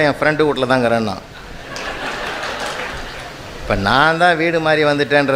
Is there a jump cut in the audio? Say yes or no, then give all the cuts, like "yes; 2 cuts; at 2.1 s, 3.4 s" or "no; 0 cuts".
no; 0 cuts